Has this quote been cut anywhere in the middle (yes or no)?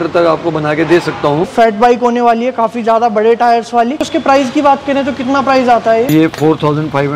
yes